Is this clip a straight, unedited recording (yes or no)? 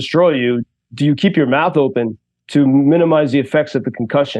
yes